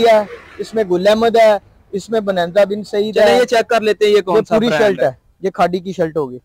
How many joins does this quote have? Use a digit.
0